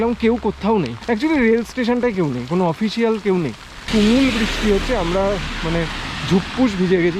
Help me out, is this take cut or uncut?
cut